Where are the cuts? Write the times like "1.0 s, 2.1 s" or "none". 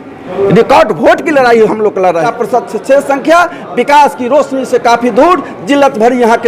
2.3 s